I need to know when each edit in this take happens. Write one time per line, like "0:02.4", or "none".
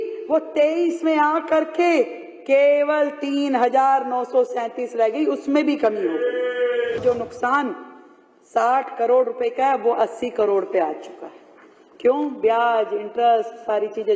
0:07.0